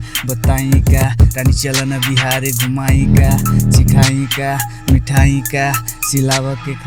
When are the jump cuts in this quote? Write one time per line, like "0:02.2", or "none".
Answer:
none